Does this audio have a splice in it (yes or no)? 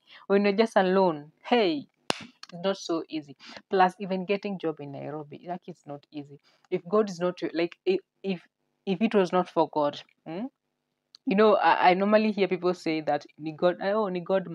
no